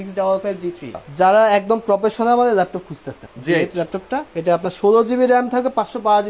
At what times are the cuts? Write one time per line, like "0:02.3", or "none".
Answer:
0:01.0
0:03.2
0:04.3